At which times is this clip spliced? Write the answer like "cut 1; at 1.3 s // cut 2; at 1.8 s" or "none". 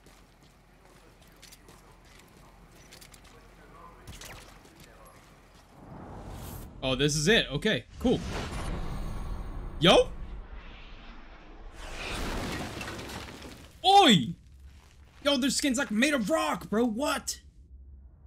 none